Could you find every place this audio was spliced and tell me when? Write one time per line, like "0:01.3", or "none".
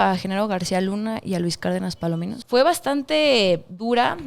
0:02.3